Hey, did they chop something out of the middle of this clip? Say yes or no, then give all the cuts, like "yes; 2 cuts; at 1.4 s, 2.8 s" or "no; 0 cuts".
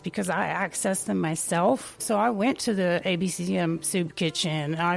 no; 0 cuts